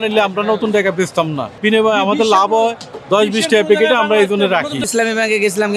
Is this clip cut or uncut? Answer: cut